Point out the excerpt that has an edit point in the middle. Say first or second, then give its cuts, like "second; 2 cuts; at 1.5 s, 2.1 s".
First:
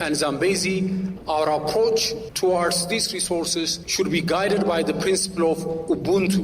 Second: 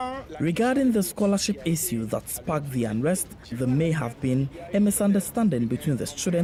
first; 3 cuts; at 1.1 s, 2.2 s, 3.8 s